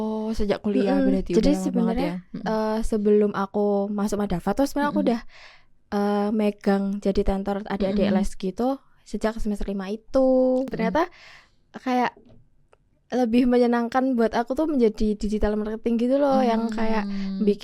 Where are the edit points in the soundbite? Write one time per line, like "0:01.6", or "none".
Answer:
0:10.7

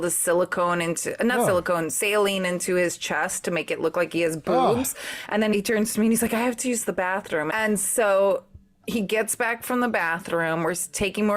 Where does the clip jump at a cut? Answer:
0:05.4
0:07.5

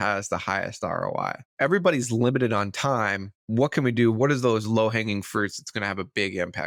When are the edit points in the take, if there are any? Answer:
none

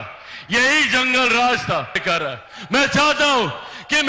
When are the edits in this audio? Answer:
0:02.0

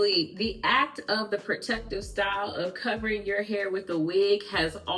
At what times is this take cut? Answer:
none

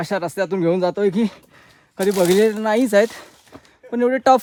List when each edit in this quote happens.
none

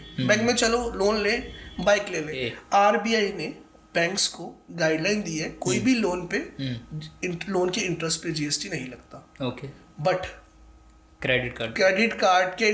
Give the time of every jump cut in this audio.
0:02.4

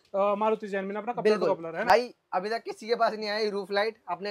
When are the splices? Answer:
0:01.9

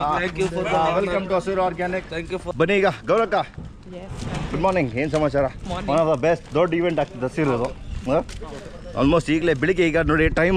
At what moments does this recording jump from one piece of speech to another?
none

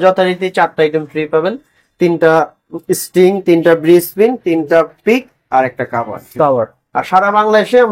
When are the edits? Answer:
none

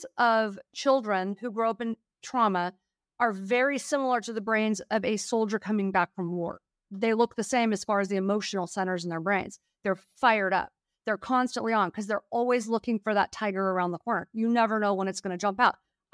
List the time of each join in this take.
none

